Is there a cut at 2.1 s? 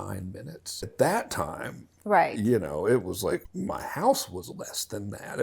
no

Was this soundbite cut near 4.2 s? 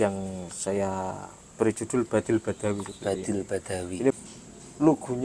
yes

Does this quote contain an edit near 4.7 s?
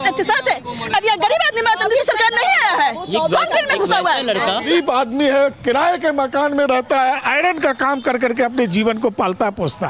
yes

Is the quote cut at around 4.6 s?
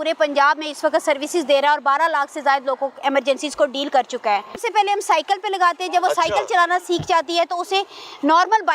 yes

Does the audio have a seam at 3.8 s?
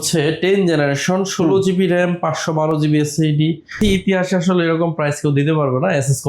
yes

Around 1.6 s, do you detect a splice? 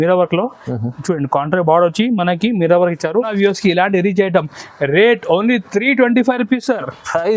no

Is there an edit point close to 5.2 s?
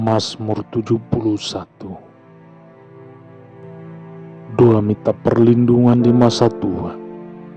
no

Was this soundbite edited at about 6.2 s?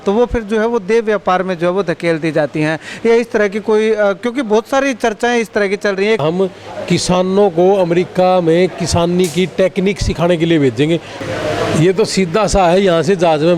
yes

